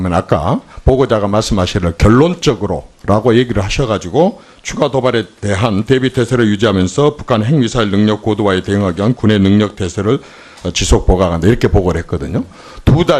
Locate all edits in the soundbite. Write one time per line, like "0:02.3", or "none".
0:09.7